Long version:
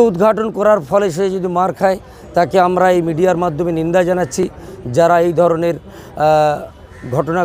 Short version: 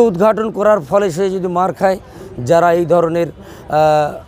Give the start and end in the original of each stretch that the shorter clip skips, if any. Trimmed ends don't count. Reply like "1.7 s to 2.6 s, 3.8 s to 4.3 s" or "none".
2.2 s to 4.6 s